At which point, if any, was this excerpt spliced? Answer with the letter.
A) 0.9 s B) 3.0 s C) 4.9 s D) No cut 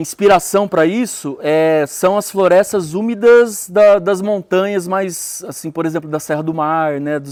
D